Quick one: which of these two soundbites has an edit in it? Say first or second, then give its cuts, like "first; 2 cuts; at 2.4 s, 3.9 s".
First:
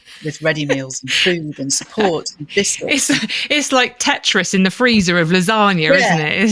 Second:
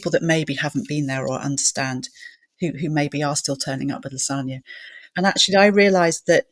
second; 1 cut; at 5.1 s